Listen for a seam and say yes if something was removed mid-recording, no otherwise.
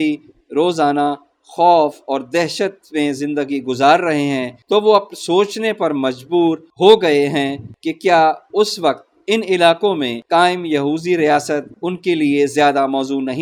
no